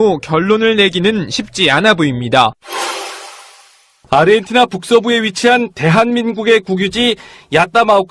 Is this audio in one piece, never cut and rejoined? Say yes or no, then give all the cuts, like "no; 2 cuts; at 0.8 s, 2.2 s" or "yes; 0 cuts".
yes; 0 cuts